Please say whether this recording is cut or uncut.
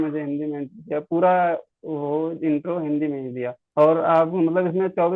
cut